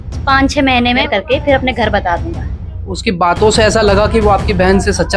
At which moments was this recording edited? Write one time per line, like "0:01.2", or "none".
0:01.0
0:02.8